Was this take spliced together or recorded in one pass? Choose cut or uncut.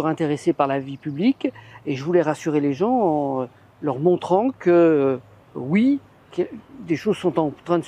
uncut